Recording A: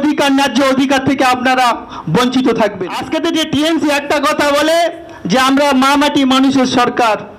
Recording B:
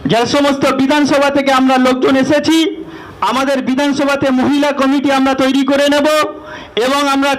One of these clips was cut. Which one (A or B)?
A